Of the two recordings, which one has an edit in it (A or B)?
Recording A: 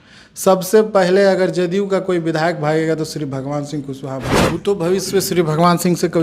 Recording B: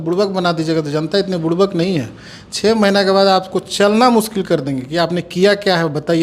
A